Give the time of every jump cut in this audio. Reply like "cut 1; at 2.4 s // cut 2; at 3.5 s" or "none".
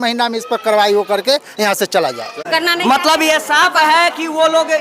cut 1; at 2.4 s